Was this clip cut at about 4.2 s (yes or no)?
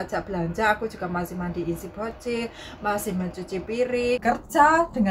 yes